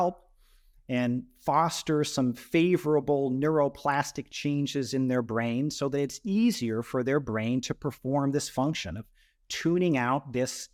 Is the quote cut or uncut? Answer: uncut